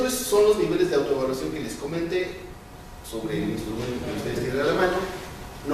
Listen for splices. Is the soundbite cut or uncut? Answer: cut